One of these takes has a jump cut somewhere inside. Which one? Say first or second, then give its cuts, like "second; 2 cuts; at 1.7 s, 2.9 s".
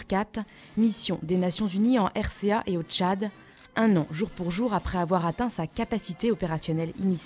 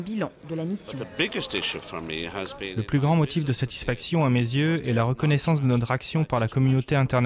second; 2 cuts; at 1.0 s, 2.7 s